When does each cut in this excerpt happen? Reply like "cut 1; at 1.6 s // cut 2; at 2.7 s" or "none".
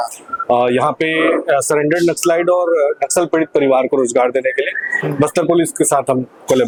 none